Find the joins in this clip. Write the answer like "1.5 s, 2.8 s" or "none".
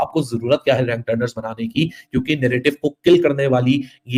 none